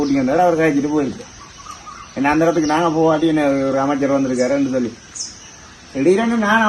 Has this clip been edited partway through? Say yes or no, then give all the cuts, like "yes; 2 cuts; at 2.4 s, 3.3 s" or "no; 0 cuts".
no; 0 cuts